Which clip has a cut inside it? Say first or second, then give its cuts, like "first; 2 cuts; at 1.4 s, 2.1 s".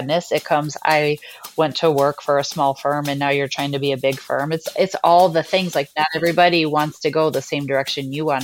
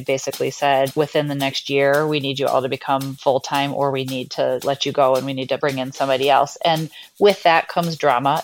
second; 4 cuts; at 0.9 s, 3.1 s, 4.6 s, 5.6 s